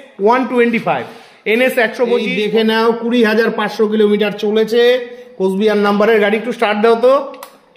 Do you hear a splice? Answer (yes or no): yes